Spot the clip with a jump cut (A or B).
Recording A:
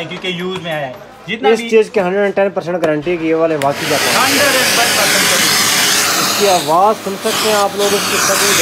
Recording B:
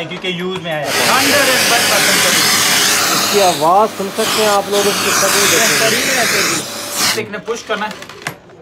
B